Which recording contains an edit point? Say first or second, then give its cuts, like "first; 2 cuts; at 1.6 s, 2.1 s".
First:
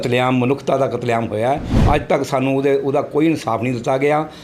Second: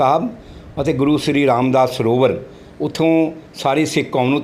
first; 1 cut; at 1.7 s